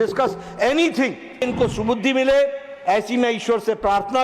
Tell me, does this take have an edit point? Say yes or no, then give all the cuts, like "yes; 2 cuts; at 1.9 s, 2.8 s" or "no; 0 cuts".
yes; 1 cut; at 1.4 s